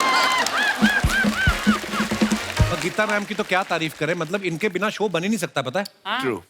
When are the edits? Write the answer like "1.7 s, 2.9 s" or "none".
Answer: 2.7 s